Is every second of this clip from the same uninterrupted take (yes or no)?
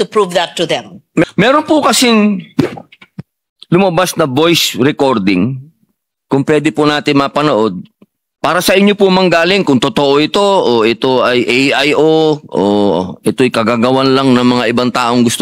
no